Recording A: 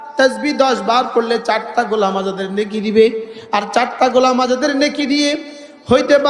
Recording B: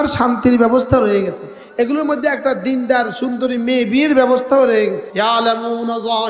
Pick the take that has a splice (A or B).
B